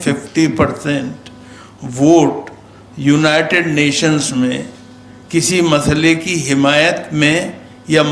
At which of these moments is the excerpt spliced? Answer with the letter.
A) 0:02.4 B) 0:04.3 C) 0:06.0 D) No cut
D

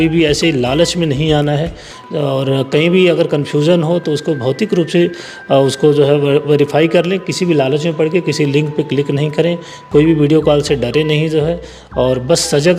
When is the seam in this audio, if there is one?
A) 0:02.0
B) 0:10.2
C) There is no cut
C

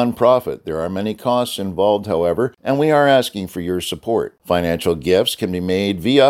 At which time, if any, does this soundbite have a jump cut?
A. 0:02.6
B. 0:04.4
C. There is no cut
A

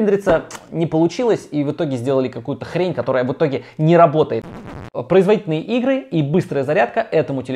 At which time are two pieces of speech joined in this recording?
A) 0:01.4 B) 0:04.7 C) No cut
B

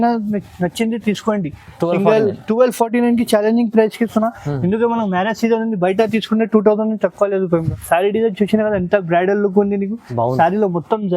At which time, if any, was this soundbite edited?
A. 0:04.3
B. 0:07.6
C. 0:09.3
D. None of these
B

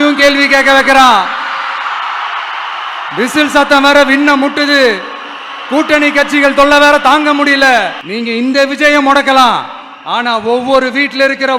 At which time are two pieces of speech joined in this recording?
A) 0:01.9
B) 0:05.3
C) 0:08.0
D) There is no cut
C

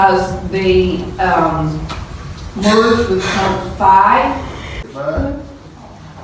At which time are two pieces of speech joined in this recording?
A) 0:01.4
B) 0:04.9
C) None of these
B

